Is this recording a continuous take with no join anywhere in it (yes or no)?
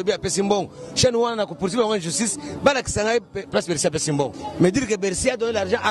no